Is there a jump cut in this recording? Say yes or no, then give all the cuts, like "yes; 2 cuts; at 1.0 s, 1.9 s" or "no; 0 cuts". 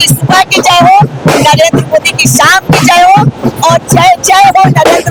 no; 0 cuts